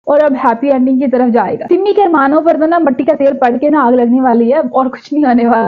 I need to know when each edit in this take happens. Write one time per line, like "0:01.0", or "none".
none